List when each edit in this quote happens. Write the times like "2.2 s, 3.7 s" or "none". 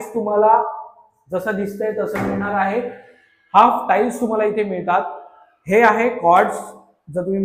none